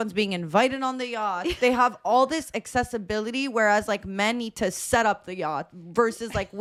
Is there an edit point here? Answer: no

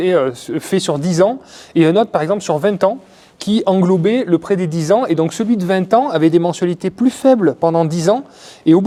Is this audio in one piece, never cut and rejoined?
yes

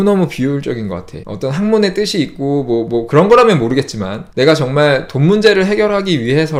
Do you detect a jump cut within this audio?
no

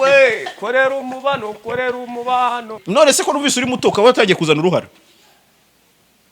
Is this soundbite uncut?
no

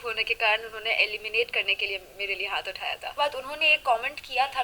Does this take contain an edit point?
yes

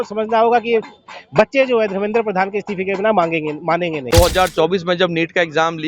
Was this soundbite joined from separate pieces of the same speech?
yes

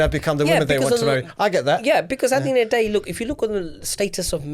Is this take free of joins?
yes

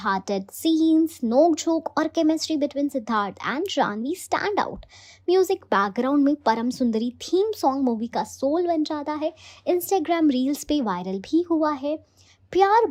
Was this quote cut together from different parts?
no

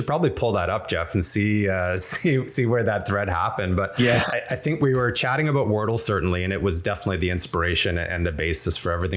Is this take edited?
no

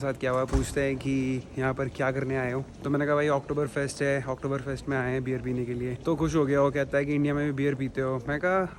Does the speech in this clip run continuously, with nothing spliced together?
yes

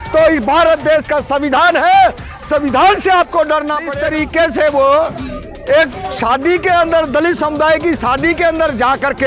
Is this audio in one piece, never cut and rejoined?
no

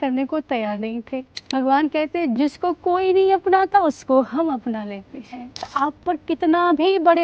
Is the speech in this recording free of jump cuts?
no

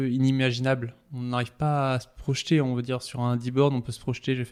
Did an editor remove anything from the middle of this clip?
no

